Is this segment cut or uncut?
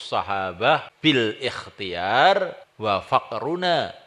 cut